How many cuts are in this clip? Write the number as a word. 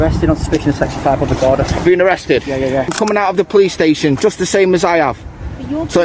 one